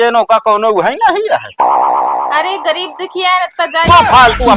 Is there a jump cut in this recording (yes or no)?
no